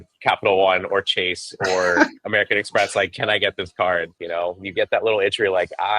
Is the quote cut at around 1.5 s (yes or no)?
no